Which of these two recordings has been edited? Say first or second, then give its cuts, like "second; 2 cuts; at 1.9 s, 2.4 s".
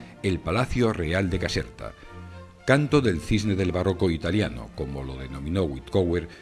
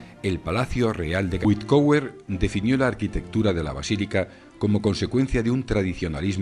first; 1 cut; at 1.4 s